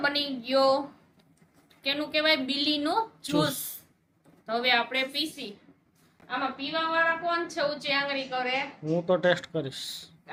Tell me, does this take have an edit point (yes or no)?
no